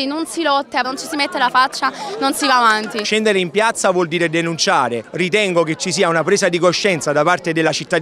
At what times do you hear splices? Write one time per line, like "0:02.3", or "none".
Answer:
0:00.8
0:03.0
0:05.0

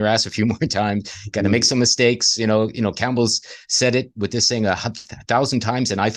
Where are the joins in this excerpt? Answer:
none

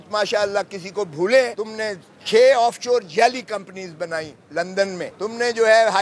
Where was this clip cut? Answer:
0:01.6
0:05.1

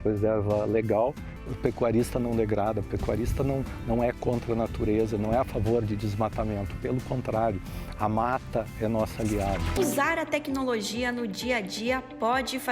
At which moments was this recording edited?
0:01.3
0:09.8

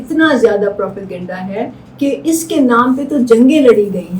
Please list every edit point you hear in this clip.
none

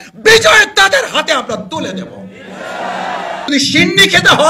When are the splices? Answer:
0:03.5

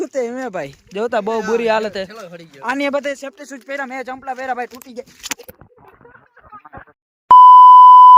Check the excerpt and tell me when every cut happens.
0:07.0

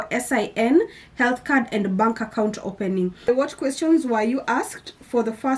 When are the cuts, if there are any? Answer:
0:03.3

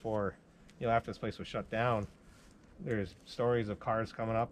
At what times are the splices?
none

